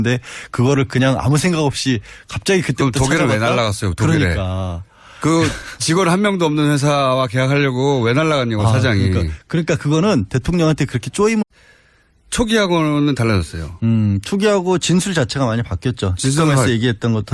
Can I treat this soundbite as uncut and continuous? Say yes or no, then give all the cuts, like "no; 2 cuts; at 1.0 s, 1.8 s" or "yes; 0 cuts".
yes; 0 cuts